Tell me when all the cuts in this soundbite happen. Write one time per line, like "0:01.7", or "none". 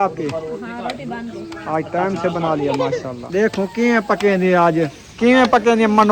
0:03.2
0:05.0